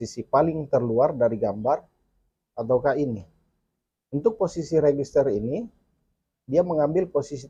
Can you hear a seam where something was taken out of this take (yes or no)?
no